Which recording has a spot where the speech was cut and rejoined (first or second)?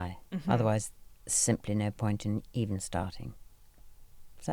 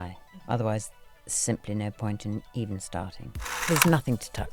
second